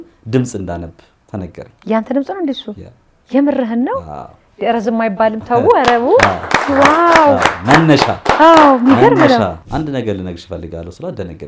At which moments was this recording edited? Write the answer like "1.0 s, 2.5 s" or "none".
9.6 s